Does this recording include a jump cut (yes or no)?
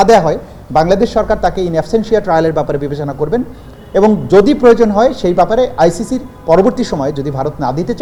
no